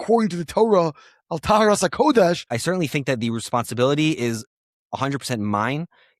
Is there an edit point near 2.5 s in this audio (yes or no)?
yes